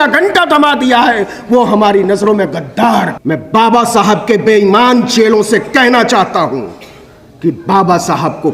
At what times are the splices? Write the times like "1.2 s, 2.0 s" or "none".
3.2 s